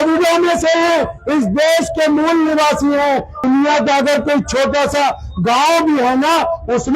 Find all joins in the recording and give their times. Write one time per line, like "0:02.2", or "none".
0:03.4